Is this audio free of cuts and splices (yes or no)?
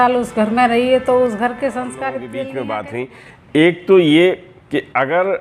no